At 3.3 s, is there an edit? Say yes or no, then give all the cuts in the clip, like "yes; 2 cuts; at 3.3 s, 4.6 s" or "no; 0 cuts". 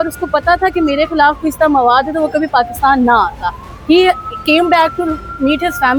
no; 0 cuts